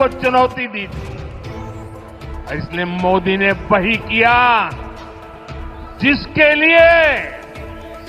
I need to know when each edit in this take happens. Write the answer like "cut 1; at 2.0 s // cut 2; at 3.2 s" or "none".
none